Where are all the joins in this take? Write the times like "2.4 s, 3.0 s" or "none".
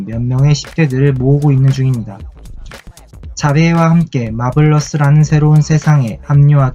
none